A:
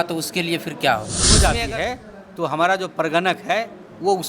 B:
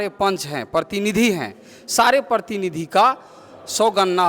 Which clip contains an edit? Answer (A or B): A